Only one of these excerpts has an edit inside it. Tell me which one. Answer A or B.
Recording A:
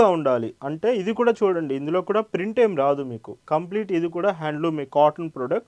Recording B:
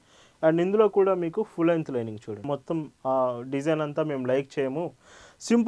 B